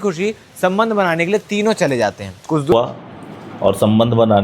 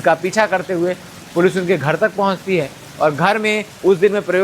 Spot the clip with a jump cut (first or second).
first